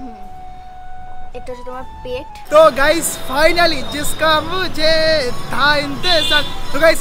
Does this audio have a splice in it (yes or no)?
yes